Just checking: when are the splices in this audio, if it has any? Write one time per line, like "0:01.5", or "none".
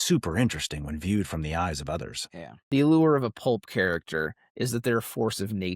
0:02.5